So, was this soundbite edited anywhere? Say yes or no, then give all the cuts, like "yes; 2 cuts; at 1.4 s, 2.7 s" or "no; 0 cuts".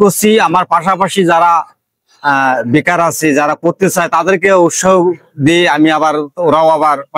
no; 0 cuts